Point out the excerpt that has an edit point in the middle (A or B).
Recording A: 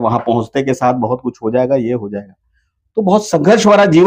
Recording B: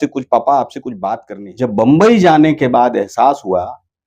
B